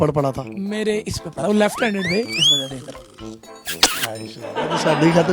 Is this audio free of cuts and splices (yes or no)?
no